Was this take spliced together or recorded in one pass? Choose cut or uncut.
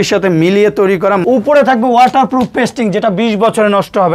cut